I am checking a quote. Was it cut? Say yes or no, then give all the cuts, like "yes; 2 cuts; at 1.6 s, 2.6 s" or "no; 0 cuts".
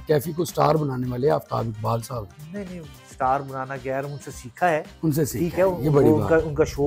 no; 0 cuts